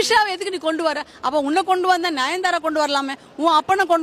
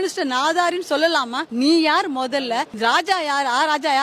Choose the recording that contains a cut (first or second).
second